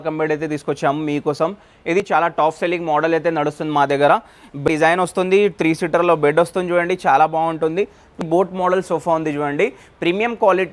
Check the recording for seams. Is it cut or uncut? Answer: cut